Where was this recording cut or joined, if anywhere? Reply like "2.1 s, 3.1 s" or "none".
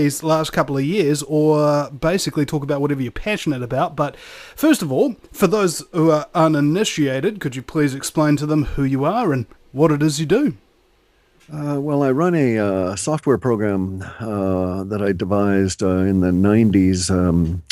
12.7 s